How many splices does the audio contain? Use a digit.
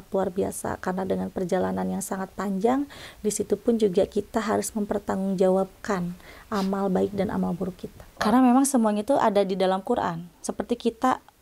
1